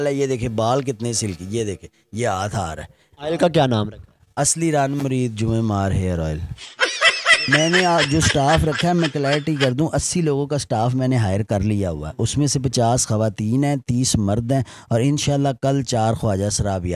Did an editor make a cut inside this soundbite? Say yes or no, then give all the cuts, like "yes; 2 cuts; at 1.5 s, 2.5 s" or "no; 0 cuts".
yes; 1 cut; at 7.3 s